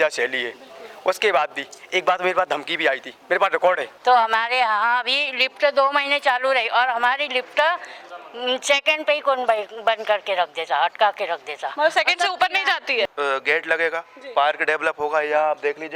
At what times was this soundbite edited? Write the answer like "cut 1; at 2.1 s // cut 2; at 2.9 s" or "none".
cut 1; at 3.9 s // cut 2; at 13.1 s